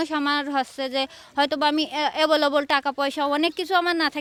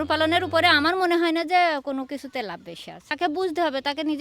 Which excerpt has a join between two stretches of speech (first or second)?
second